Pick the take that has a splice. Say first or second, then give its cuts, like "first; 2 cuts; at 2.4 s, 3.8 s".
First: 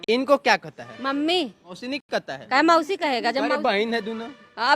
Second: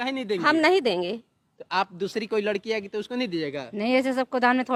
first; 1 cut; at 2.1 s